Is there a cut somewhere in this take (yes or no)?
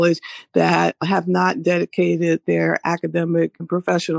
no